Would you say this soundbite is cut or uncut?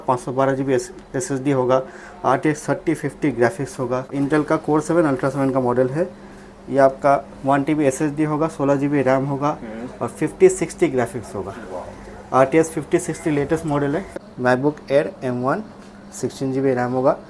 cut